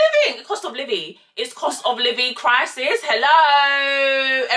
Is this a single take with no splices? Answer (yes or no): yes